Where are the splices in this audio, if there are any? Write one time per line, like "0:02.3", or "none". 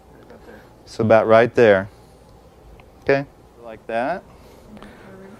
0:03.8